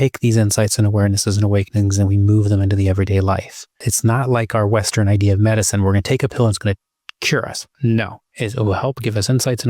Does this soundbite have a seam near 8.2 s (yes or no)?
yes